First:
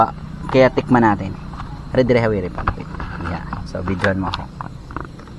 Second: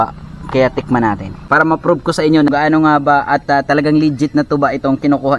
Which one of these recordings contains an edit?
second; 2 cuts; at 1.3 s, 2.5 s

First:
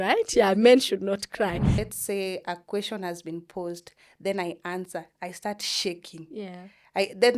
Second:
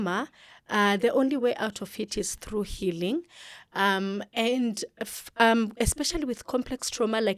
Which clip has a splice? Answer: first; 1 cut; at 1.8 s

